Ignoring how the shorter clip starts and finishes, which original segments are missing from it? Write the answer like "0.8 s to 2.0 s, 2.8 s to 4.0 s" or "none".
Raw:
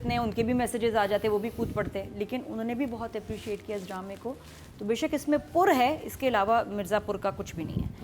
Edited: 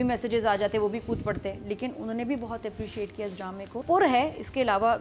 4.3 s to 5.5 s